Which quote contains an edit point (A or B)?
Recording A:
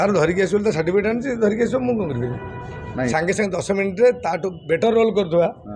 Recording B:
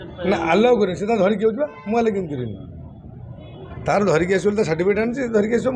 A